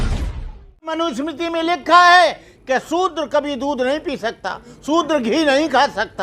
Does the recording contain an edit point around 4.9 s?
no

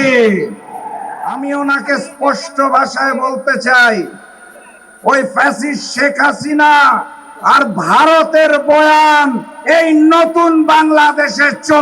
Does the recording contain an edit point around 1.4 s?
yes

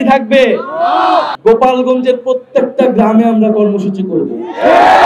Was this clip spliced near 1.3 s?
yes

